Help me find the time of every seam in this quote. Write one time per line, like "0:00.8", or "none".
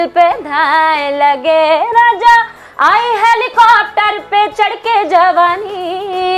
none